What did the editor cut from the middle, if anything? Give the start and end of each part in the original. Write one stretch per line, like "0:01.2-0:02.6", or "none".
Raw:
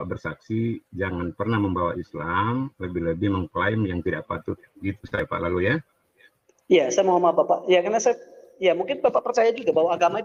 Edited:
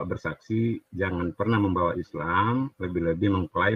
none